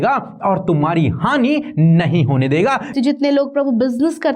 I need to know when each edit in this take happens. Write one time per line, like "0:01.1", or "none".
0:02.9